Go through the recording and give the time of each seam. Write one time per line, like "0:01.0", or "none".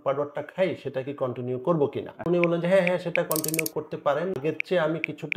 0:02.3
0:04.4